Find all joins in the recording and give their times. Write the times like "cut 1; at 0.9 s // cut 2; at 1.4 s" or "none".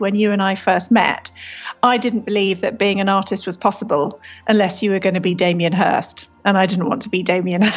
none